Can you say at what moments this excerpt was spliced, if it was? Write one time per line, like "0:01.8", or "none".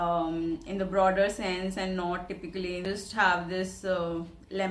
0:02.9